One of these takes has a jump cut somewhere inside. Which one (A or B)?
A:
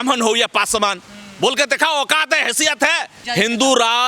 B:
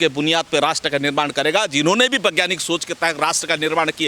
A